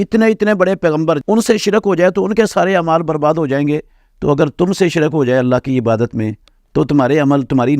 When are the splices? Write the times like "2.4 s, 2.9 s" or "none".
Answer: 1.2 s

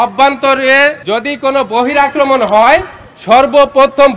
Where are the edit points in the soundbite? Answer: 1.0 s

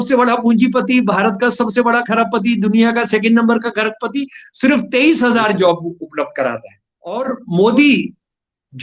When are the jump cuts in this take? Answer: 7.2 s

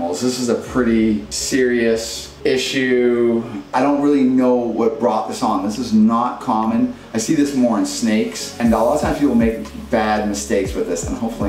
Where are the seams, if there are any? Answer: 1.3 s, 2.2 s, 3.7 s, 8.6 s

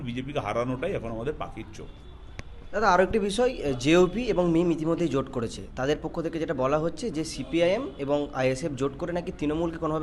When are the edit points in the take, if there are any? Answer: none

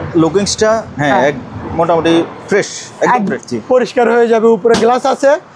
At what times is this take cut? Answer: 3.4 s

